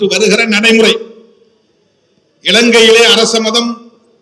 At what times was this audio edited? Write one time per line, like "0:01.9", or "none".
none